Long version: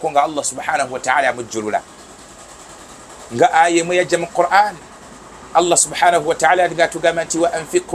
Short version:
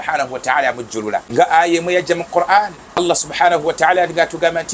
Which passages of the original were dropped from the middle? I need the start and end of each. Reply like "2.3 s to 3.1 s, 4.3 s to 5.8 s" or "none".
1.9 s to 3.3 s, 5.0 s to 5.6 s